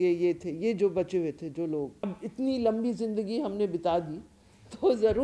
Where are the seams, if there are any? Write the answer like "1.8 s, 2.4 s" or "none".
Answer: 2.0 s

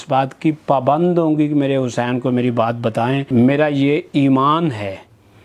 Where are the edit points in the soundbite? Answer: 3.3 s

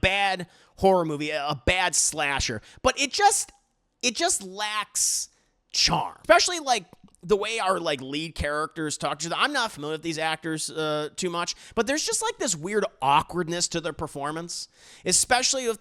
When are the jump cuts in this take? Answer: 6.1 s

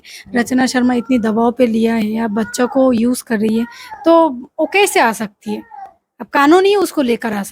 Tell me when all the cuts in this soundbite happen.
none

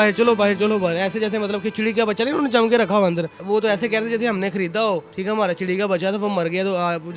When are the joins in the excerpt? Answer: 3.4 s, 5.1 s

